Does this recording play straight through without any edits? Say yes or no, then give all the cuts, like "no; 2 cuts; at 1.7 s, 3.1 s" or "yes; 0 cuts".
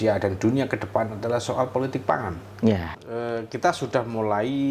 no; 1 cut; at 3.0 s